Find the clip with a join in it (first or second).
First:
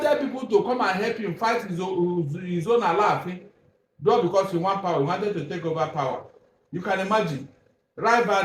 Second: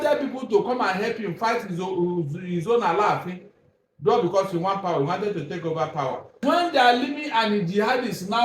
second